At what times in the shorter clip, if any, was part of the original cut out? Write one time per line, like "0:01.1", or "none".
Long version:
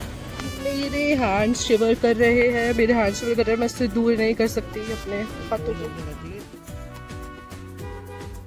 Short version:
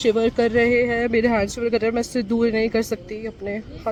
none

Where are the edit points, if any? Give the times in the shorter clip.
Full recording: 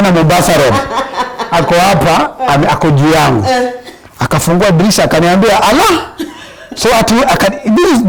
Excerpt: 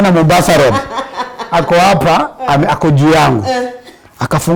none

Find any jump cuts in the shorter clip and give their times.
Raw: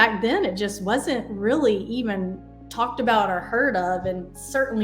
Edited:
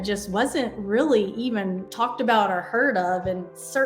0:01.8

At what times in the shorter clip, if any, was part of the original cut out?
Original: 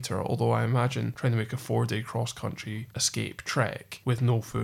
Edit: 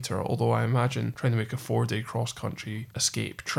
none

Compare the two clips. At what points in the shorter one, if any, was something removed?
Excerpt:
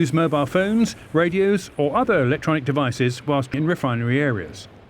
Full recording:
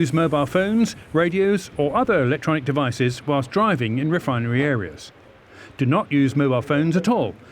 0:03.5

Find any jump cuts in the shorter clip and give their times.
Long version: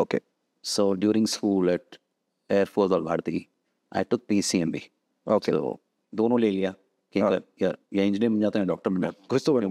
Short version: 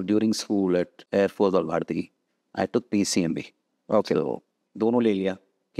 0:01.0

